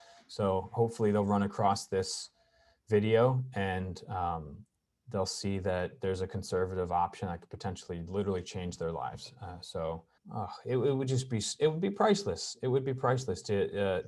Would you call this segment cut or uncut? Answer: cut